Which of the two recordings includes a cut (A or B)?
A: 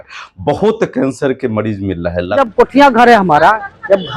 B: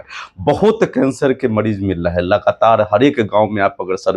A